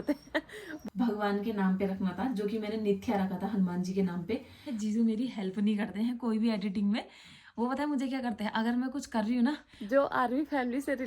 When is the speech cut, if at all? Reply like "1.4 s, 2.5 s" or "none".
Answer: 0.9 s, 4.7 s, 9.7 s